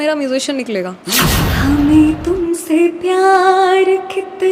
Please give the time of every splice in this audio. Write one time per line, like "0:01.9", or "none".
0:01.1